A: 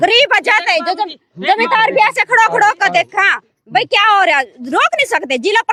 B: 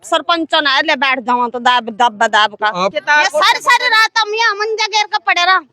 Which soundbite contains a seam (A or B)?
B